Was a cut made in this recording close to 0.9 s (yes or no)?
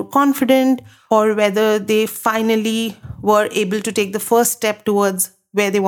yes